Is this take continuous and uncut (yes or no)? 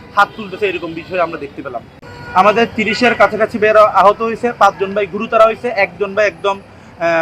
no